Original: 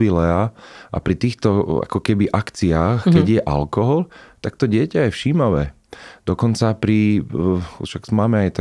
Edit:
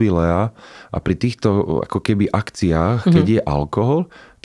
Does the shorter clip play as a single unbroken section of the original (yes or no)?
yes